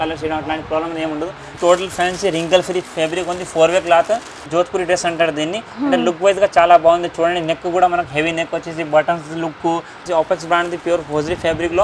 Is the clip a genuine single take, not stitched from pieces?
no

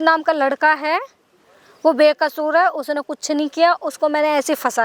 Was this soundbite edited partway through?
no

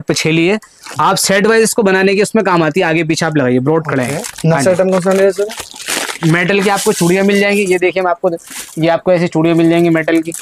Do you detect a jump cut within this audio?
no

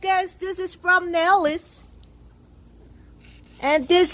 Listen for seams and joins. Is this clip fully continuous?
yes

